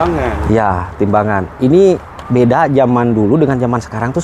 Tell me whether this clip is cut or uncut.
uncut